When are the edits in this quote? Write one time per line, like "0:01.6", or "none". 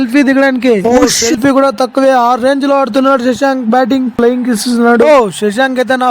0:04.1